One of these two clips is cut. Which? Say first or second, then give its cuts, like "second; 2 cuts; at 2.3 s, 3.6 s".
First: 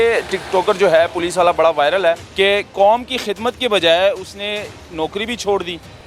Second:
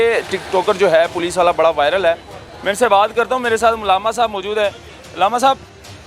first; 1 cut; at 2.3 s